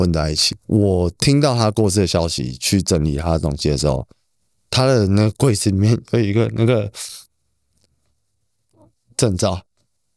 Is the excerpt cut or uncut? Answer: uncut